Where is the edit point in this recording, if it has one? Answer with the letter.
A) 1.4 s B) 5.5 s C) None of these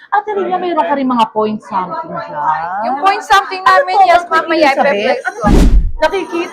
B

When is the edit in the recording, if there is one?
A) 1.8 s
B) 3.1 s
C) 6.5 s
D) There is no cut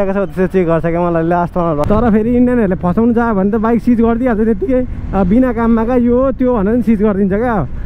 A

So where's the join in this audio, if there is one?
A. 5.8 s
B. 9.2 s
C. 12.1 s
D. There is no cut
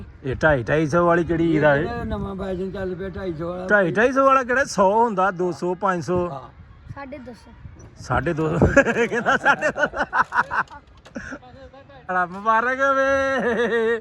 C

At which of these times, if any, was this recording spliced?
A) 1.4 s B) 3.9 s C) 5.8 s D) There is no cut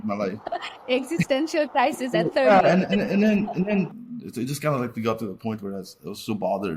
B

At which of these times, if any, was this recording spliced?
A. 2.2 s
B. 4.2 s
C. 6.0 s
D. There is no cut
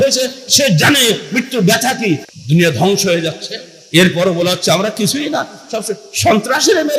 D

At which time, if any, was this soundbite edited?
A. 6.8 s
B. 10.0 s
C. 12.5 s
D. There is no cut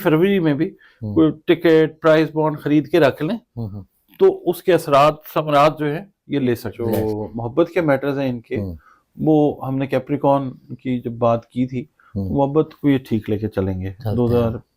A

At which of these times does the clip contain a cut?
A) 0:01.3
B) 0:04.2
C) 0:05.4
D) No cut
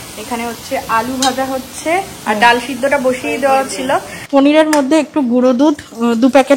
B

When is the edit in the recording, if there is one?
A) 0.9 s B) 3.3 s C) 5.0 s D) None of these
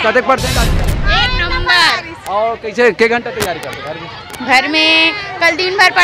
A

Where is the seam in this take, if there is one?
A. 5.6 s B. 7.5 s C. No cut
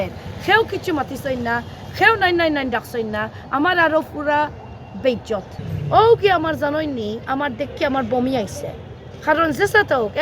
A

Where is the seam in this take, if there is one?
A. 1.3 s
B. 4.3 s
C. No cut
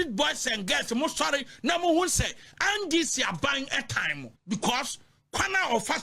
B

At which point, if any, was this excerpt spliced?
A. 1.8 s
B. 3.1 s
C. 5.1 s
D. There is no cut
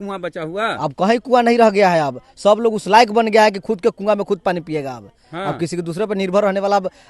D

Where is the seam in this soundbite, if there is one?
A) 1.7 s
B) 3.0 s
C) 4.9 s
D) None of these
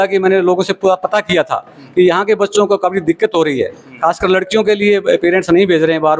D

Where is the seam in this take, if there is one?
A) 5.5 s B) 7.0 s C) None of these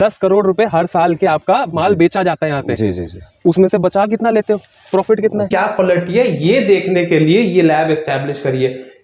A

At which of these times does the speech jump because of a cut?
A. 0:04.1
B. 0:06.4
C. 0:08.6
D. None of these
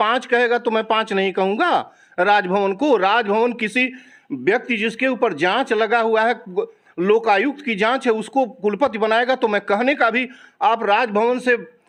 D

